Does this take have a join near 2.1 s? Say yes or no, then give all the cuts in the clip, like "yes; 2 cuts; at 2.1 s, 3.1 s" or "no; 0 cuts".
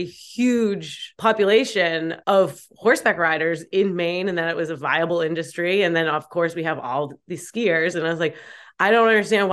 yes; 2 cuts; at 1.1 s, 2.1 s